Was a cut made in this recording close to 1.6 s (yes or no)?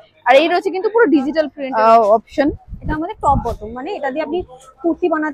yes